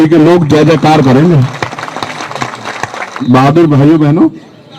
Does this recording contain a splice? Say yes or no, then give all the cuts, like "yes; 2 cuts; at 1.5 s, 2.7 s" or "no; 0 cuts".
yes; 1 cut; at 3.1 s